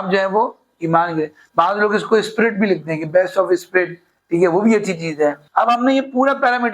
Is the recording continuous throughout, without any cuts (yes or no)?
no